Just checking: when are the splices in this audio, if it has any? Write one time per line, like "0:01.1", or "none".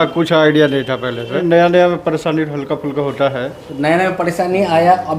0:01.4